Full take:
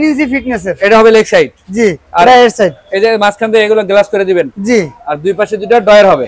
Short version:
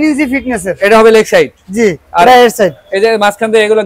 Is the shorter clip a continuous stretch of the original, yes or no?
yes